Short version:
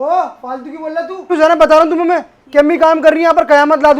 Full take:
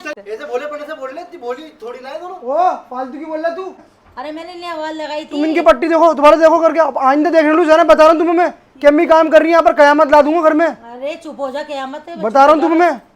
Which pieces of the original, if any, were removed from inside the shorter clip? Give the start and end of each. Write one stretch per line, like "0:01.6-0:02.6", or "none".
0:03.8-0:07.6